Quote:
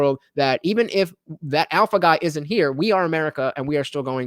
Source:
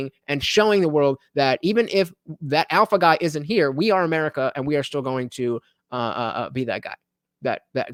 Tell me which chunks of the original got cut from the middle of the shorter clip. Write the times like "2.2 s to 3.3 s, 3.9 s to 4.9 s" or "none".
none